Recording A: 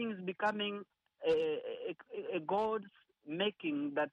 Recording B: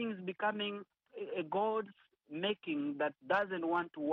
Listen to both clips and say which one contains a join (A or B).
B